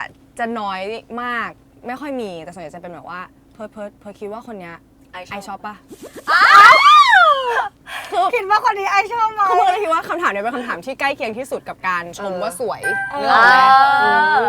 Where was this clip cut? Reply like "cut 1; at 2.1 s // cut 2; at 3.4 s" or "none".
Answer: none